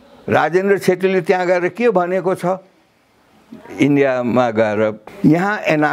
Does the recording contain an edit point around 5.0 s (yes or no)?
yes